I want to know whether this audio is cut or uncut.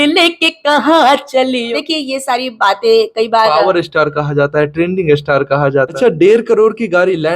cut